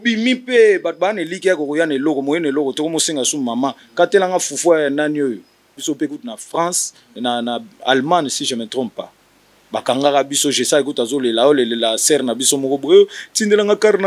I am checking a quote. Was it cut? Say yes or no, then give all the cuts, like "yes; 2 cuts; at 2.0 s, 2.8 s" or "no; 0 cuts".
yes; 1 cut; at 5.8 s